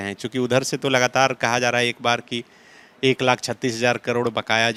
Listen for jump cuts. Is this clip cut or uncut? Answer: uncut